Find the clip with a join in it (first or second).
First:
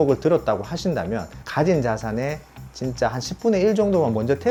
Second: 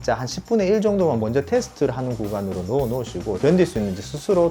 second